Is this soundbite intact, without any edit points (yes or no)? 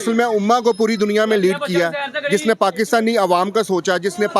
yes